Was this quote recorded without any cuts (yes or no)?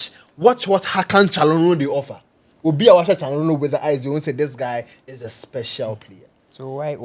yes